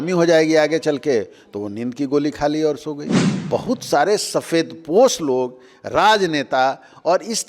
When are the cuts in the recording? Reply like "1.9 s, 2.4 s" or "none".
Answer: 3.2 s